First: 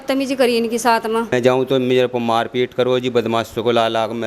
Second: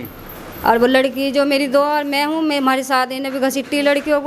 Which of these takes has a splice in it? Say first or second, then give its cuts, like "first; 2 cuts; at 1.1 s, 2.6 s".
first; 1 cut; at 1.3 s